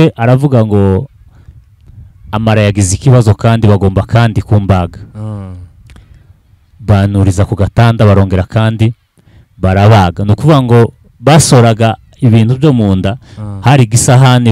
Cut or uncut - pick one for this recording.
uncut